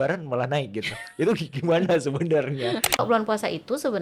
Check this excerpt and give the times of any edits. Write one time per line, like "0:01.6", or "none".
0:03.0